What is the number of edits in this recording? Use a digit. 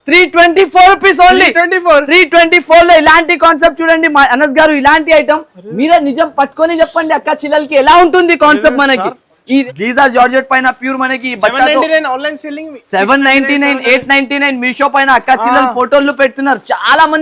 1